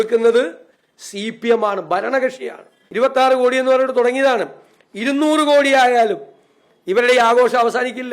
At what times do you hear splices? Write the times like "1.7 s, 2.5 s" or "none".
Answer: 2.8 s